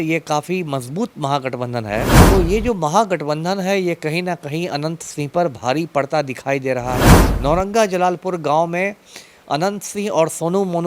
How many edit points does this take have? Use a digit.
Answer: 2